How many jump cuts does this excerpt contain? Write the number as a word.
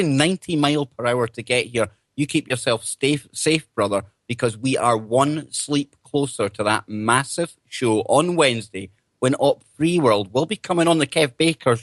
one